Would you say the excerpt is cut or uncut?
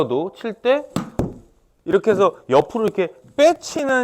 uncut